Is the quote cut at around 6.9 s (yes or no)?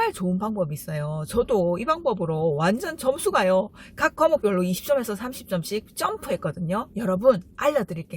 yes